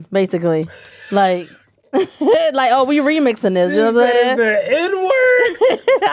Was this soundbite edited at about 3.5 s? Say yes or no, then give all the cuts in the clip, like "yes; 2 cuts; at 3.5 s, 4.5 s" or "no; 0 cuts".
no; 0 cuts